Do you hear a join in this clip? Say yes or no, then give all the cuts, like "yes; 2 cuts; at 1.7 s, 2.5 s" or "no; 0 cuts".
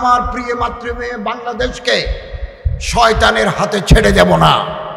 no; 0 cuts